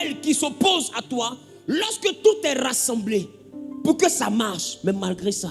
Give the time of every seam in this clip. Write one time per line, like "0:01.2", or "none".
none